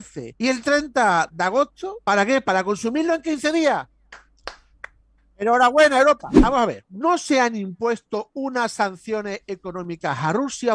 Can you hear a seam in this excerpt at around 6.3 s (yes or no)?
yes